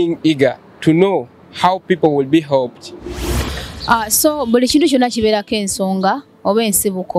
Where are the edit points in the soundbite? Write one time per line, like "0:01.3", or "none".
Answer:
0:03.6